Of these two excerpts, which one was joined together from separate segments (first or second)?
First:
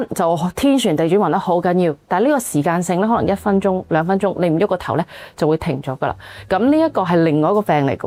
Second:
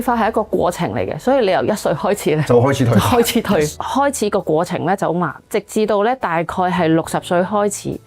second